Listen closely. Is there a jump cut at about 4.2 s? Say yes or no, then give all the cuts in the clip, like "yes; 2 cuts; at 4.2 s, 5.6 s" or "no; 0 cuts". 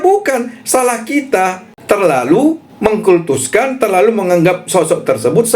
no; 2 cuts; at 1.7 s, 2.7 s